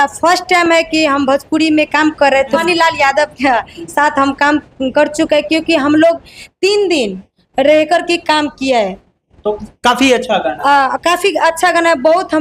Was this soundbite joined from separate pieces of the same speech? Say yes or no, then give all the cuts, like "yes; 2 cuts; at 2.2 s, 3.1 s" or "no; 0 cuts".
yes; 1 cut; at 2.6 s